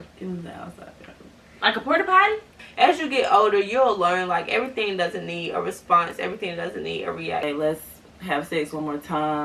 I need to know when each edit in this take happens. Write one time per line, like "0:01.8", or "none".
0:02.6
0:07.4